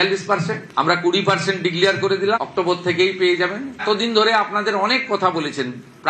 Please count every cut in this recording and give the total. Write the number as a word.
zero